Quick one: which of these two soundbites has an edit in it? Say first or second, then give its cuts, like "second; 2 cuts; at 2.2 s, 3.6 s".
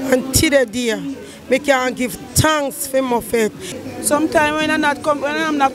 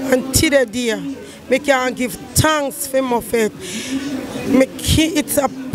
first; 1 cut; at 3.7 s